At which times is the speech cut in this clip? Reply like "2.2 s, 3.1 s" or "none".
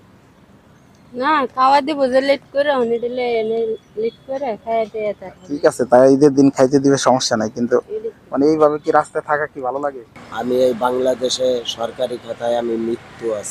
10.1 s